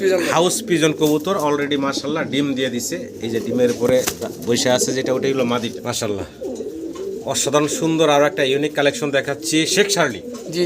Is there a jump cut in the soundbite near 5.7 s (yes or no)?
yes